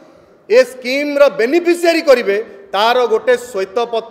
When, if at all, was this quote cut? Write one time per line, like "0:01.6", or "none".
none

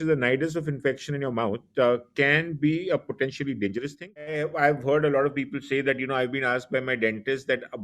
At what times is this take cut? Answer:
0:04.3

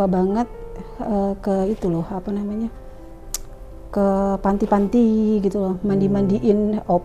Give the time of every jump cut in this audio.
none

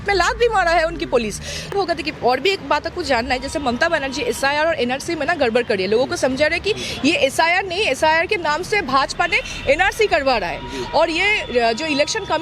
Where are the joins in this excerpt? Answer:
0:01.7

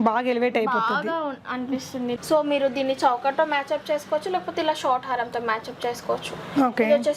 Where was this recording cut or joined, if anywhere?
0:02.2

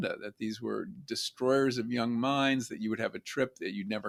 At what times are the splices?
none

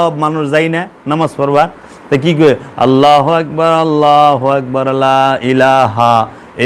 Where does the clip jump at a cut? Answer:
none

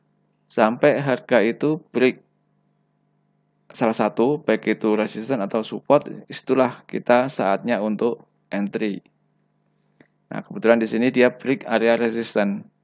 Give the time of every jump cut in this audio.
none

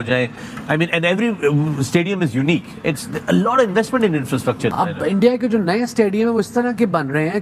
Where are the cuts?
0:04.7

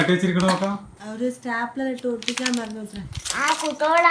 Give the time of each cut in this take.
0:01.0

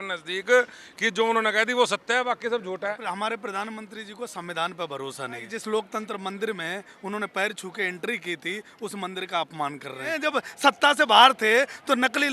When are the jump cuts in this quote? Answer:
0:03.0
0:05.5
0:10.1

